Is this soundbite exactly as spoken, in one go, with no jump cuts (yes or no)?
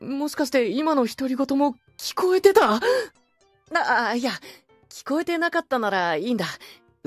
no